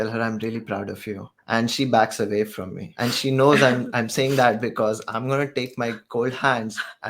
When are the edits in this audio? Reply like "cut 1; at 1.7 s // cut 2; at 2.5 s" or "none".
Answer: cut 1; at 1.3 s // cut 2; at 2.9 s